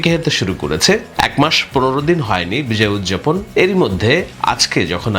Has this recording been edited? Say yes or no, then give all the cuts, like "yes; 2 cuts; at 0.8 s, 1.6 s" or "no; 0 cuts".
yes; 2 cuts; at 1.1 s, 3.4 s